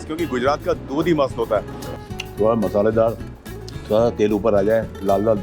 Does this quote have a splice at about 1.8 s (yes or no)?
yes